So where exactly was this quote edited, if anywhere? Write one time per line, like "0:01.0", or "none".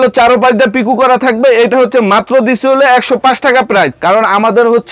0:03.9